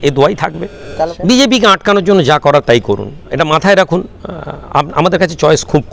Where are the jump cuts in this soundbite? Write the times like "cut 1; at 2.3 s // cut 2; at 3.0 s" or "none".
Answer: cut 1; at 1.1 s